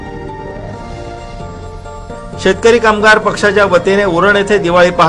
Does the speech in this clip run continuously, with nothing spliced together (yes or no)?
no